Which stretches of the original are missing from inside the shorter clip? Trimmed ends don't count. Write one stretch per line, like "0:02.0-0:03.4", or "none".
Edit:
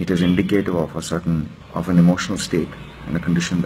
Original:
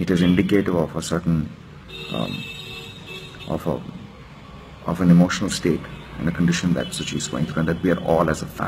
0:01.6-0:04.7